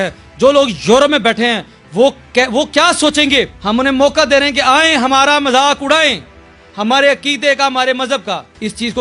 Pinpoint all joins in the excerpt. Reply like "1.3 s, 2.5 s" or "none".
none